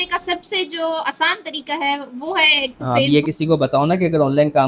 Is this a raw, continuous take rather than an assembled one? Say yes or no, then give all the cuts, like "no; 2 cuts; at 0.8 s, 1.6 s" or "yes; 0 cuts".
no; 1 cut; at 2.8 s